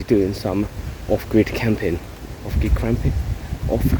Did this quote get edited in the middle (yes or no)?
no